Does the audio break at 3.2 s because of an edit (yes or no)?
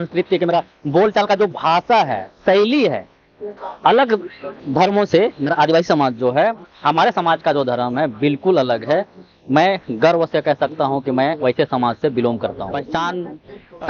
no